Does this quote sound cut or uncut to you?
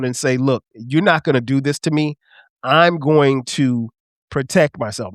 uncut